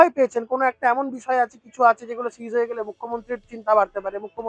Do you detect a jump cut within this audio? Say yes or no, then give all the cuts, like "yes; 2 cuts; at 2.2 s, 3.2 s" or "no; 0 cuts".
no; 0 cuts